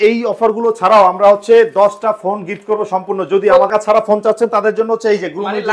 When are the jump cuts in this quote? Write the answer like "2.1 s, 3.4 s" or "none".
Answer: 3.7 s